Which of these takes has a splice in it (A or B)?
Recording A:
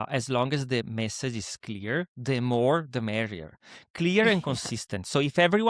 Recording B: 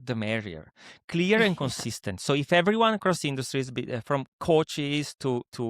B